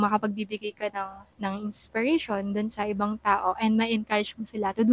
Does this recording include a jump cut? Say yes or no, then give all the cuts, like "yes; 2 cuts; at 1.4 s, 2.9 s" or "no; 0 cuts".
no; 0 cuts